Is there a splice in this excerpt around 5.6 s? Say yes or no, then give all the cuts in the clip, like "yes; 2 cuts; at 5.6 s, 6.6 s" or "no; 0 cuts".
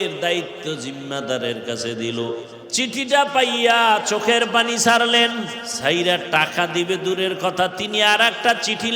yes; 2 cuts; at 2.6 s, 5.6 s